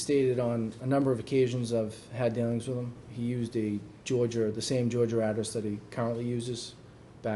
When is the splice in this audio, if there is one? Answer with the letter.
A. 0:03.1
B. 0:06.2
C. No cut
C